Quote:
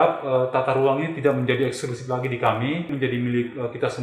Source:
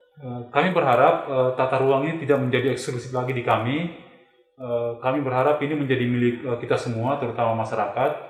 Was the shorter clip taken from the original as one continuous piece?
no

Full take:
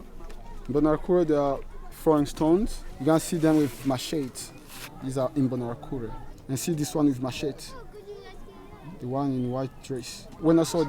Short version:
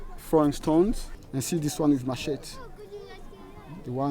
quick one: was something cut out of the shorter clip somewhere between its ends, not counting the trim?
yes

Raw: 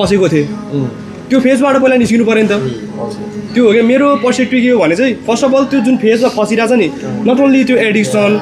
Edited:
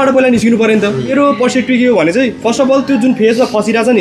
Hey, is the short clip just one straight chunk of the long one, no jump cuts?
no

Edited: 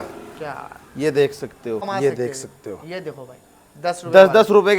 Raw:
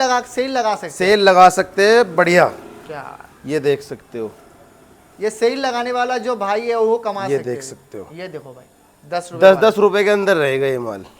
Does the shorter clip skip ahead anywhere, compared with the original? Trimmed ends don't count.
yes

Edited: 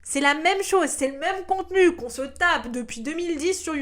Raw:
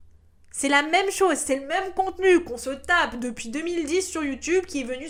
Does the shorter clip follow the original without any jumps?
yes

